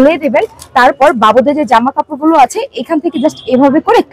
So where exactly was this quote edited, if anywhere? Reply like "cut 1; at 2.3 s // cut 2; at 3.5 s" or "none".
none